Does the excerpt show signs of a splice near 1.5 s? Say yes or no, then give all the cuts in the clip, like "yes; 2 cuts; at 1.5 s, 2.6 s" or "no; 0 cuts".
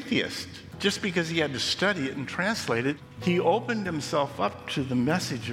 no; 1 cut; at 3.1 s